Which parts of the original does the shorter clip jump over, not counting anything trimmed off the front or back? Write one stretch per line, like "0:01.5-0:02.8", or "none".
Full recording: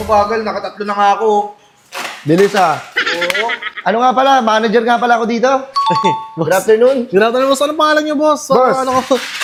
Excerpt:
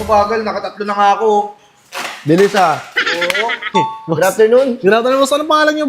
0:03.7-0:06.0